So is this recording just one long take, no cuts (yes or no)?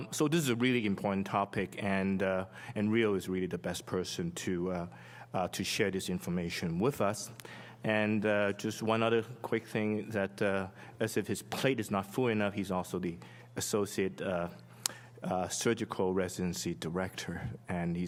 yes